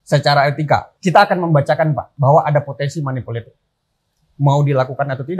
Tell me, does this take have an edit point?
yes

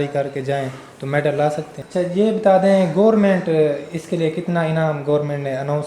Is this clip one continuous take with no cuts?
no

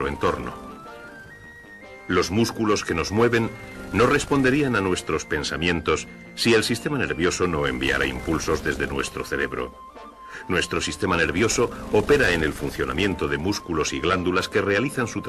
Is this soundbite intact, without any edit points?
yes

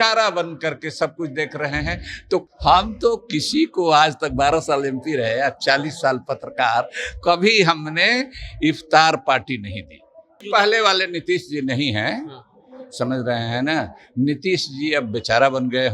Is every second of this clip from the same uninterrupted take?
no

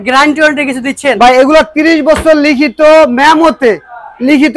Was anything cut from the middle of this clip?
no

